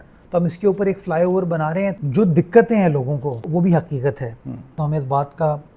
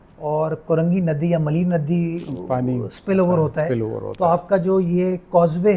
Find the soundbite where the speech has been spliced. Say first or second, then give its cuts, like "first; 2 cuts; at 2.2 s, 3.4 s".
first; 3 cuts; at 2.0 s, 3.4 s, 4.7 s